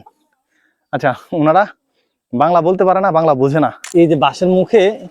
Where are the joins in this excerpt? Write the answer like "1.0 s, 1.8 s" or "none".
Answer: 3.8 s

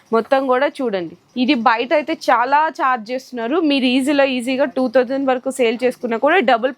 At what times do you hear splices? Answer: 1.2 s

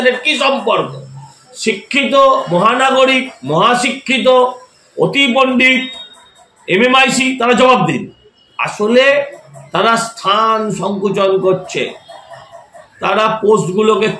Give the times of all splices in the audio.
none

